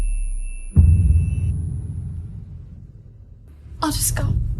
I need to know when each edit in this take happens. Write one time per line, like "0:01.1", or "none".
0:03.6